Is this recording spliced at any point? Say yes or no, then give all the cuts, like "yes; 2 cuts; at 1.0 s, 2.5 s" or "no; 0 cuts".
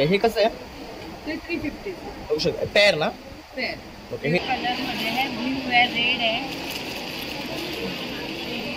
yes; 1 cut; at 4.4 s